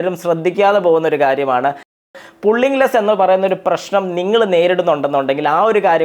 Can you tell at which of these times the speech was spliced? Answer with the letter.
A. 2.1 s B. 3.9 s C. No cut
A